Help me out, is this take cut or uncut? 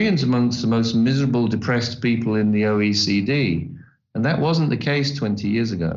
uncut